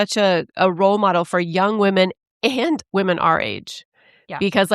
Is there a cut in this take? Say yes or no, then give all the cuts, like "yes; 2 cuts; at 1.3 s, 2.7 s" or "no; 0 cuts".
yes; 1 cut; at 2.8 s